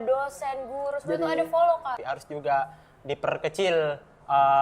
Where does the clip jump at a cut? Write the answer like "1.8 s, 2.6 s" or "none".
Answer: 2.1 s